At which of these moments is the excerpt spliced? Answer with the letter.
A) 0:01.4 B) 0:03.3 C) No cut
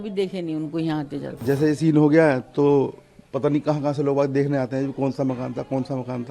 A